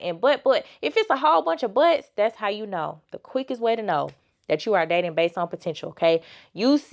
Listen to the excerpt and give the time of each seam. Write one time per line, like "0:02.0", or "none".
none